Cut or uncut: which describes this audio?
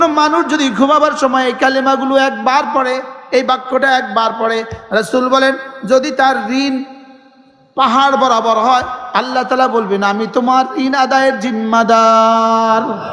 uncut